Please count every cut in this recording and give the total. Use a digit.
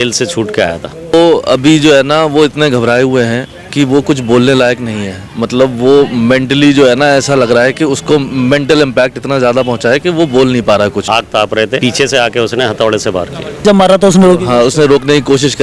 3